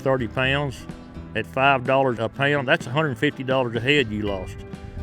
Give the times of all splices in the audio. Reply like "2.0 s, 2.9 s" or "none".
2.2 s